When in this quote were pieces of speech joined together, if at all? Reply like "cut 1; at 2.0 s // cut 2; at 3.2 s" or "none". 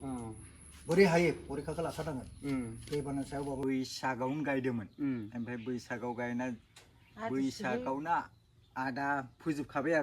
cut 1; at 3.6 s